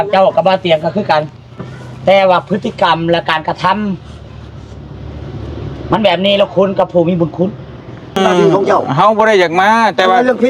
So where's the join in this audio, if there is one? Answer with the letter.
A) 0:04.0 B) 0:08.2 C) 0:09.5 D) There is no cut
B